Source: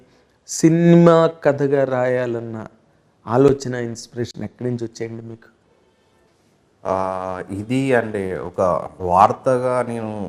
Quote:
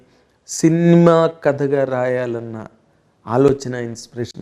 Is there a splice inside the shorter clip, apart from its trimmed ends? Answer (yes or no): no